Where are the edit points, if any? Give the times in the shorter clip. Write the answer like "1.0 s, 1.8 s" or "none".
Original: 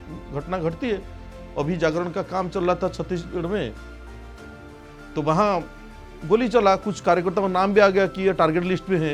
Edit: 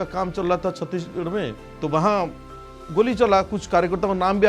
1.6 s